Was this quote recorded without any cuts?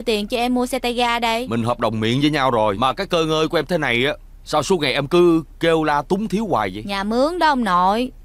no; 2 cuts; at 1.4 s, 2.8 s

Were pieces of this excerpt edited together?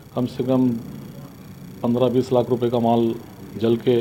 no; 0 cuts

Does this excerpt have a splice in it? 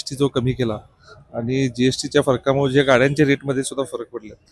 no; 0 cuts

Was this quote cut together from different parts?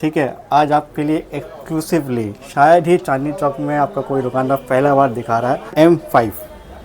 yes; 1 cut; at 5.7 s

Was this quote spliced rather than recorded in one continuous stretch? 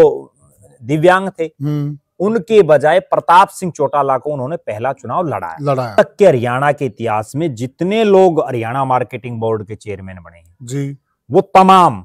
yes; 1 cut; at 5.9 s

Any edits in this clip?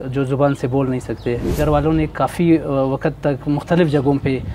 yes; 1 cut; at 1.6 s

